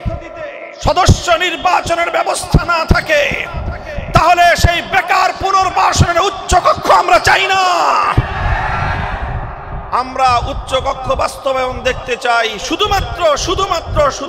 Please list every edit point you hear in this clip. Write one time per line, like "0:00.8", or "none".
none